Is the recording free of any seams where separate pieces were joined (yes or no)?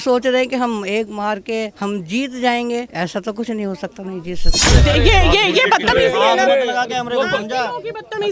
no